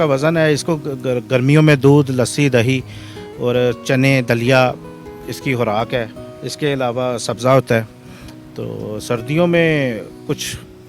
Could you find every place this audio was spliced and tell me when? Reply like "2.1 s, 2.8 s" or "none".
none